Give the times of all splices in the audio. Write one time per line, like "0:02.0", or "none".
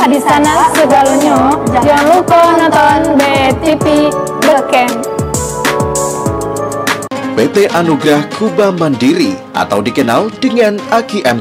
0:07.0